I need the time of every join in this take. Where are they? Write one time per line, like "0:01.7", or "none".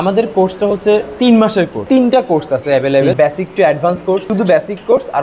0:01.8
0:03.1
0:04.2